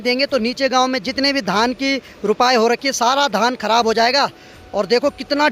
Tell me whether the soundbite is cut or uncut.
uncut